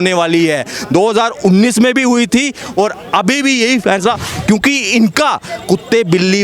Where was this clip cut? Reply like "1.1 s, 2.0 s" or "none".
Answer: 4.3 s

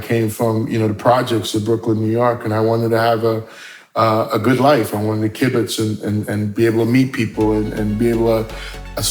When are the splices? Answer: none

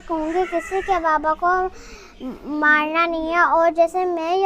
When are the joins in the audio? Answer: none

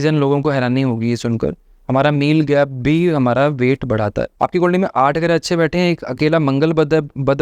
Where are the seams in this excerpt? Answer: 4.3 s

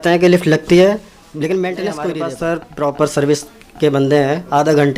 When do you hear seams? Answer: 2.1 s

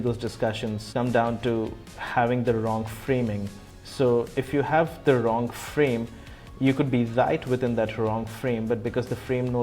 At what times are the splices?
0.9 s

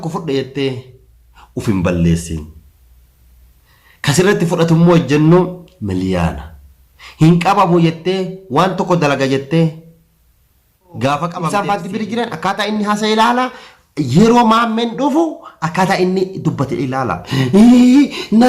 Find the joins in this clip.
11.5 s

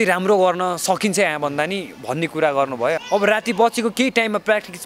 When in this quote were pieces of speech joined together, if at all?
3.0 s

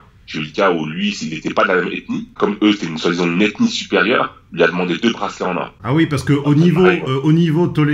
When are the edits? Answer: 2.3 s, 5.8 s

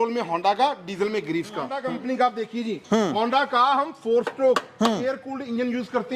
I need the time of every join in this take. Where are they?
1.8 s

